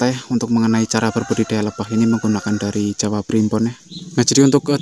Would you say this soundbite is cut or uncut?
cut